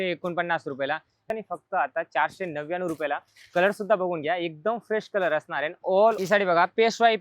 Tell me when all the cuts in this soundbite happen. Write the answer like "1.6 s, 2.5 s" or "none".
1.3 s, 6.2 s